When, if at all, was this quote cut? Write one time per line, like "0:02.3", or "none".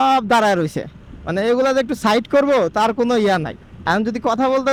none

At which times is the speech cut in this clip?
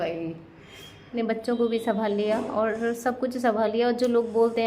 0:01.1

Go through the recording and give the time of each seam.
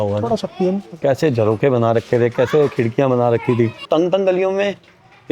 0:01.0
0:03.8

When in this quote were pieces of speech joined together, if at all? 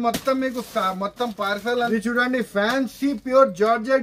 0:01.9

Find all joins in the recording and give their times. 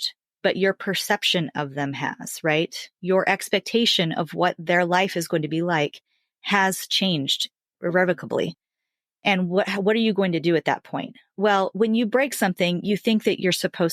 0:07.7

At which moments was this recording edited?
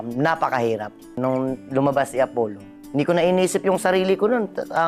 0:02.7

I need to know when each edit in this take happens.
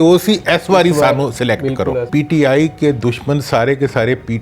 0:02.1

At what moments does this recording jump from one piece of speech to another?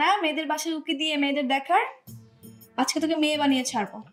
none

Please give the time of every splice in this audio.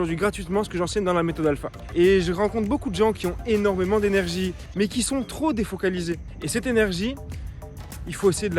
0:01.8
0:04.6
0:06.3

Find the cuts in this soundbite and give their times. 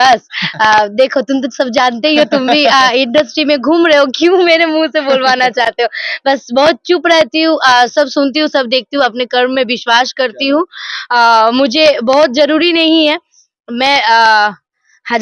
none

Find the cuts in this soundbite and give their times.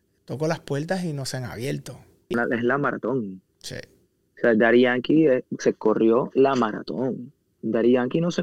0:02.3

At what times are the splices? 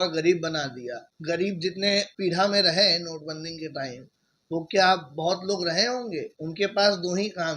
0:01.1
0:02.1
0:06.4

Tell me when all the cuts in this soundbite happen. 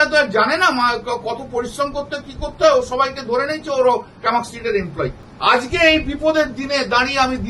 0:05.2

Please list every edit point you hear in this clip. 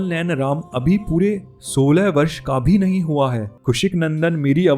0:03.5

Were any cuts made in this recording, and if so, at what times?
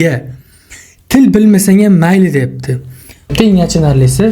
0:03.3

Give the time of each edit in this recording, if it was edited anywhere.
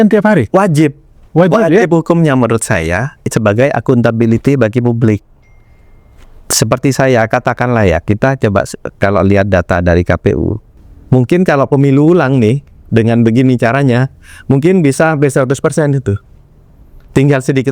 0:10.7

